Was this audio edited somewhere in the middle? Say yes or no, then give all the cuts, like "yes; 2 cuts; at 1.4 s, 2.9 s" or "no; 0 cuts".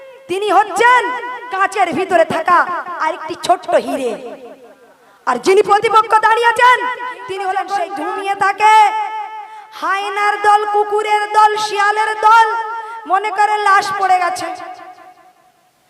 yes; 1 cut; at 7.8 s